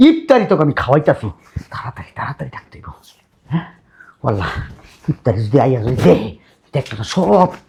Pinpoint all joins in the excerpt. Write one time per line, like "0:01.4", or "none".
none